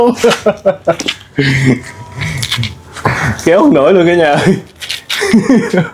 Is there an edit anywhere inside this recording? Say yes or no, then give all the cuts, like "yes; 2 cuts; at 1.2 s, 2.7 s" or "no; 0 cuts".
no; 0 cuts